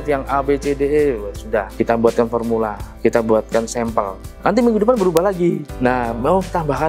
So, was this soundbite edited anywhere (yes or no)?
yes